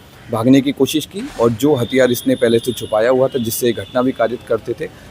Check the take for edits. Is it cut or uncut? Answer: cut